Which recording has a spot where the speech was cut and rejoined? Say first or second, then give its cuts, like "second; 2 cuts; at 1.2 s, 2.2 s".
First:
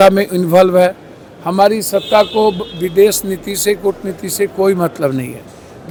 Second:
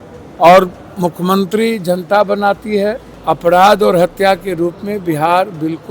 second; 1 cut; at 3.1 s